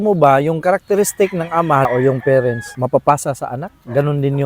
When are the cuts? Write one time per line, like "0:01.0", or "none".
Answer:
0:01.9
0:02.7